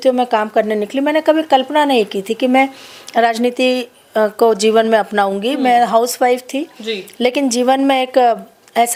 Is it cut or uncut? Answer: uncut